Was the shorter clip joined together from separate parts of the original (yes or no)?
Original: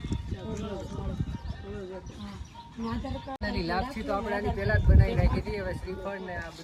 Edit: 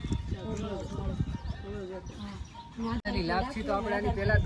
yes